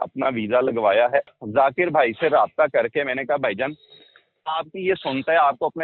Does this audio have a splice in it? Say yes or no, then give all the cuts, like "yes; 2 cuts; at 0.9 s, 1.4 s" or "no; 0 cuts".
yes; 1 cut; at 1.3 s